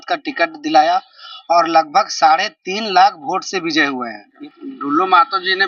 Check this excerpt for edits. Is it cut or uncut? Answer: cut